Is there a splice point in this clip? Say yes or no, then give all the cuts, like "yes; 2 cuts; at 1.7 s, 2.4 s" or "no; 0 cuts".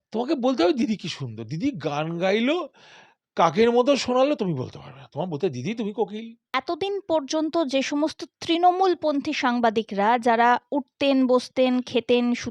yes; 1 cut; at 6.4 s